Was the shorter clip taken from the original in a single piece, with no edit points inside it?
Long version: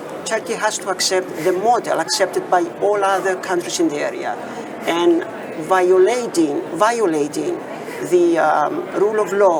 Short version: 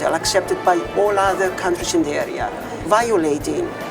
no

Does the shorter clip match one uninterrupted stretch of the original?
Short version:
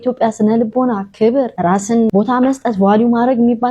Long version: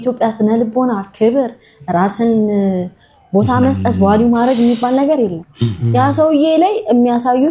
no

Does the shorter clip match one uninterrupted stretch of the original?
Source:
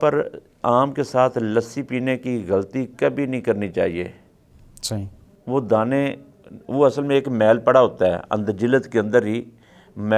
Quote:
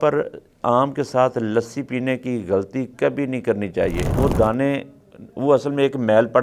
no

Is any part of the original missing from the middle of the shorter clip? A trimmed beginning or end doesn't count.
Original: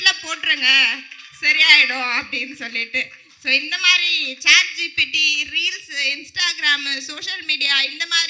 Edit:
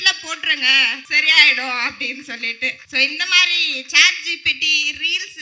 yes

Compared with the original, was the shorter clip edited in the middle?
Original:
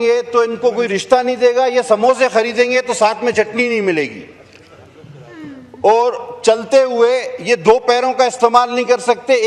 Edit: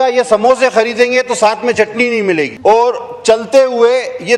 yes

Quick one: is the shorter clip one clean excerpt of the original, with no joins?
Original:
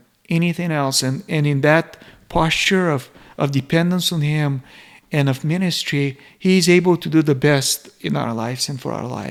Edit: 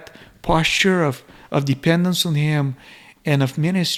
yes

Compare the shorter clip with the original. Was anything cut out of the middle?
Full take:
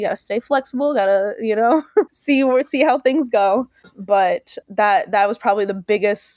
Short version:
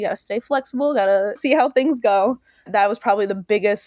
yes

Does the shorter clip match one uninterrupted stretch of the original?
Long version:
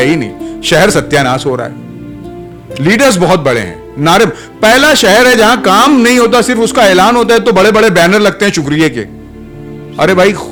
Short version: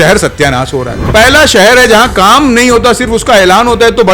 no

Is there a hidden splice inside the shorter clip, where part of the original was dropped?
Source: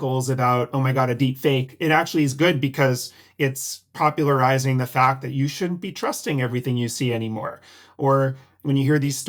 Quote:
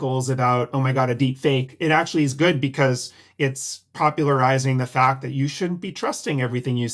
no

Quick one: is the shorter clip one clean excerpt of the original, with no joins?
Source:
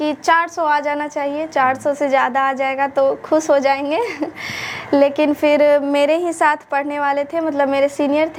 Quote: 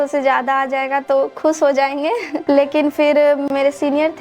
no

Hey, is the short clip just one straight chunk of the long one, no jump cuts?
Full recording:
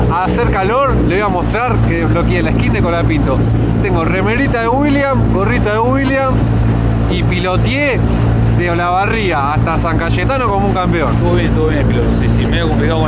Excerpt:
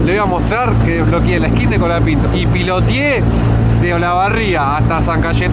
no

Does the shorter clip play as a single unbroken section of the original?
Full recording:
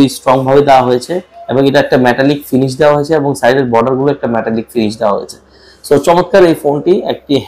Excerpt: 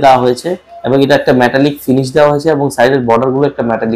yes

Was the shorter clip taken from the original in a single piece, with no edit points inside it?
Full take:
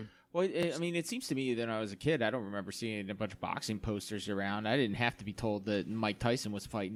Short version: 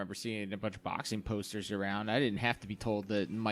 yes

